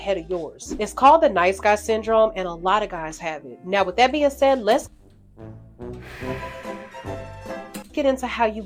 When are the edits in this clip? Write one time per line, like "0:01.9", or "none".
none